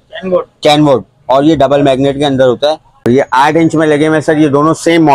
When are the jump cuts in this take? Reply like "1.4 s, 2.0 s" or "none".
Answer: 3.1 s